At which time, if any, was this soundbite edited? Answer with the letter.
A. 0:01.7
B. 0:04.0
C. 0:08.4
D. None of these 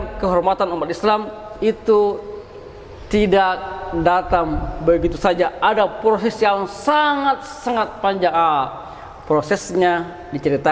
D